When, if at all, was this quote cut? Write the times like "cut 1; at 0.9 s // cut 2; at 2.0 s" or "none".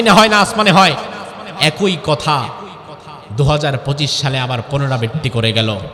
none

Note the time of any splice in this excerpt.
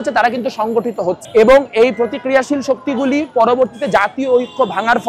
cut 1; at 1.2 s

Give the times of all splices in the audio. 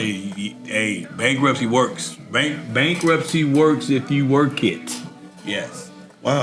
none

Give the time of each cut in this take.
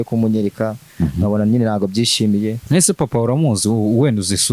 cut 1; at 2.6 s

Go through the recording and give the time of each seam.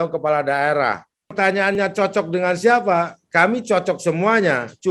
cut 1; at 1.7 s

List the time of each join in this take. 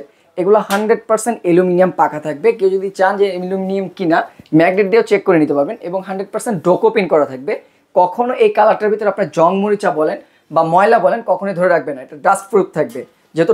none

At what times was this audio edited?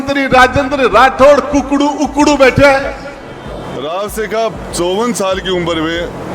cut 1; at 3.5 s

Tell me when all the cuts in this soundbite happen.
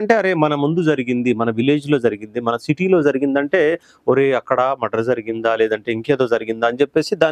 none

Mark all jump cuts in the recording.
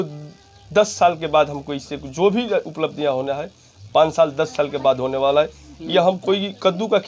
none

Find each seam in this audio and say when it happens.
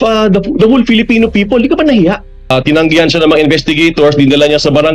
cut 1; at 2.3 s

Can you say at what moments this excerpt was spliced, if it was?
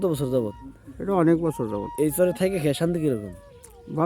cut 1; at 2.1 s

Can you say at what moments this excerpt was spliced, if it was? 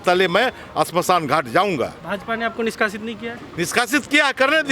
none

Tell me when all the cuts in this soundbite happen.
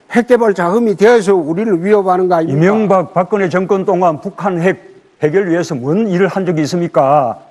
none

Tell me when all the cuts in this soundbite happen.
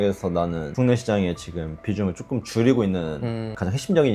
none

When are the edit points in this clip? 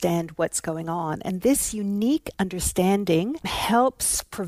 cut 1; at 3.5 s

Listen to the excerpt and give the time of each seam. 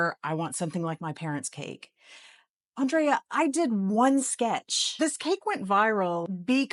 none

